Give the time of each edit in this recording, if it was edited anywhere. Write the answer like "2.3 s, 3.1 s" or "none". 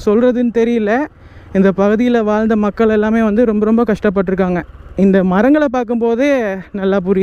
none